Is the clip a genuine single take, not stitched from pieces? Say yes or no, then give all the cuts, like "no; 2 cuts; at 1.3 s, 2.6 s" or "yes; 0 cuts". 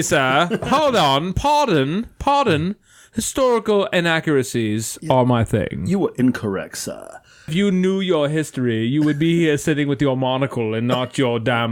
no; 1 cut; at 7.5 s